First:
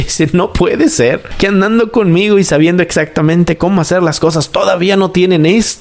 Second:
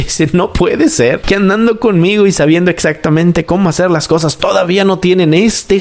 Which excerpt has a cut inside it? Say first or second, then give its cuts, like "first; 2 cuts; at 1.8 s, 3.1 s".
second; 1 cut; at 1.2 s